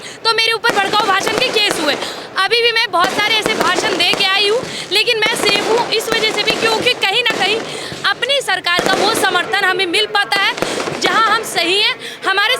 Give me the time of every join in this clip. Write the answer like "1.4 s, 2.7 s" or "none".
none